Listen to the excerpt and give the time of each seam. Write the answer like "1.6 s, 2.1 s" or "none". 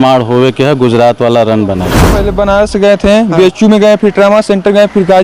2.2 s